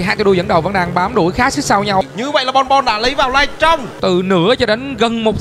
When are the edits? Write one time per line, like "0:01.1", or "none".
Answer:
0:02.0
0:03.9